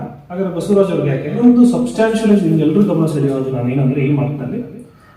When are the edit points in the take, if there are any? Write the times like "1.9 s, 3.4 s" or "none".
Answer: 1.4 s